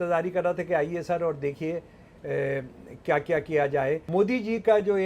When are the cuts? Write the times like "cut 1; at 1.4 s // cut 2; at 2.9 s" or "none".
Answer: cut 1; at 4.0 s